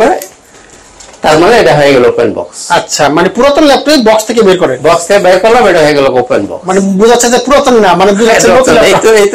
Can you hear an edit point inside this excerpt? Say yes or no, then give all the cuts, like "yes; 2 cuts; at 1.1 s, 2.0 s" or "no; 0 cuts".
no; 0 cuts